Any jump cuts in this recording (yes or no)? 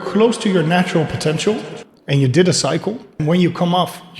yes